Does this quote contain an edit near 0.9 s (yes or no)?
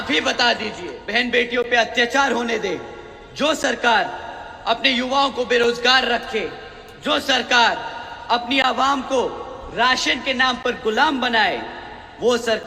yes